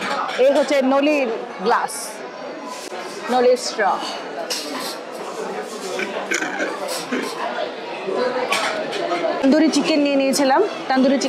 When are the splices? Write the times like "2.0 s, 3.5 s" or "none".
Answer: none